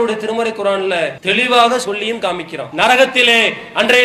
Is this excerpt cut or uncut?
cut